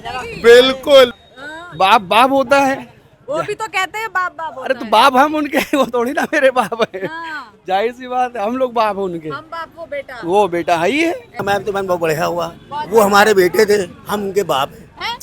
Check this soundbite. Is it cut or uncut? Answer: cut